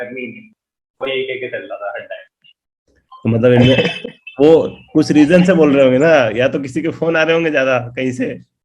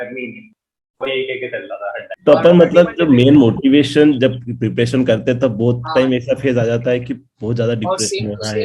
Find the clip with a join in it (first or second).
second